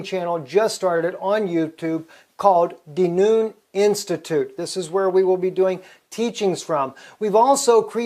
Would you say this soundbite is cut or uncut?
cut